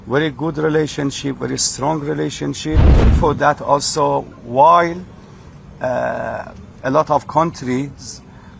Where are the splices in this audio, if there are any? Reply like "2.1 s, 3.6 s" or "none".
3.1 s